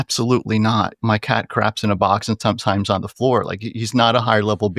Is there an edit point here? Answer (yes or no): yes